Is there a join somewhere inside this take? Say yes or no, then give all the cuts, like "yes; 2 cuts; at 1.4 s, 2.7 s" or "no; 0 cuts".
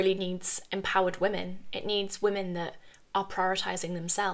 no; 0 cuts